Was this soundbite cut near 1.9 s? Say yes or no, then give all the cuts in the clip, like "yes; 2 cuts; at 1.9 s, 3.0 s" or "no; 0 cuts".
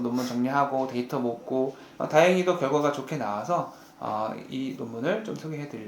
yes; 1 cut; at 1.9 s